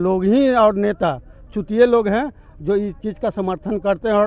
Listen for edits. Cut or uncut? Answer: uncut